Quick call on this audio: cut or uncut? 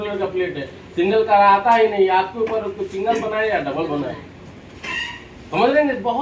uncut